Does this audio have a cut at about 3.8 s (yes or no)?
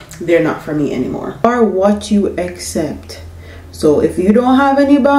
no